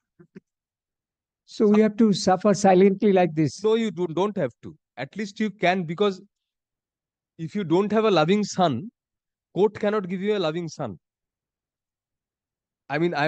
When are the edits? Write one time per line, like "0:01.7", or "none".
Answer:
none